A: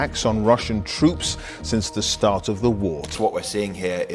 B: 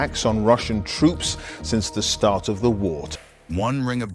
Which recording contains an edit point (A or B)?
A